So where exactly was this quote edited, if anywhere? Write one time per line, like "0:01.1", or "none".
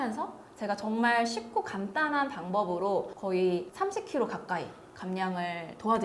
0:03.1
0:03.7